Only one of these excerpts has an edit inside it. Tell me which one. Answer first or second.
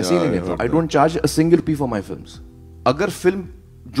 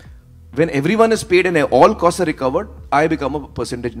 first